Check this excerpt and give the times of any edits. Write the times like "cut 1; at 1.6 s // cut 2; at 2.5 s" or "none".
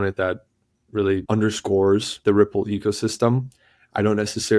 cut 1; at 1.2 s // cut 2; at 2.1 s